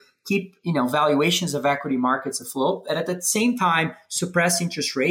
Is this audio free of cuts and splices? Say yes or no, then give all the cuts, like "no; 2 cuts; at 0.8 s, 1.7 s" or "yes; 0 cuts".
yes; 0 cuts